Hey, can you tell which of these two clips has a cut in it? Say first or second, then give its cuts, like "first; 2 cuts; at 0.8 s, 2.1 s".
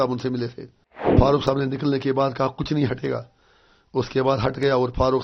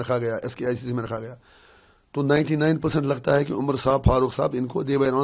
first; 1 cut; at 1.1 s